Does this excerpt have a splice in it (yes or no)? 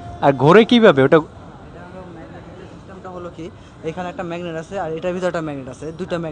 no